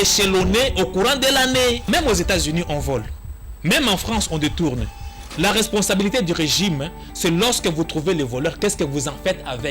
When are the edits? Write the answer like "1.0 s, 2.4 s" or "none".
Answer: 1.8 s

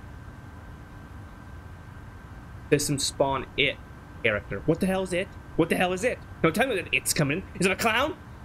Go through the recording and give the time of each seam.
none

